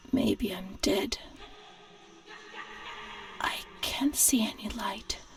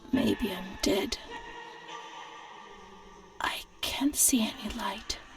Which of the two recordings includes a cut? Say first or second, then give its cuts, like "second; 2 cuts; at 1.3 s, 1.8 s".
second; 2 cuts; at 1.3 s, 3.3 s